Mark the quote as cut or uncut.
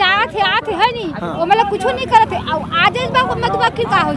uncut